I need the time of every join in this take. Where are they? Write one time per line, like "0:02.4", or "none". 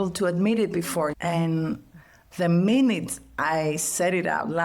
0:01.1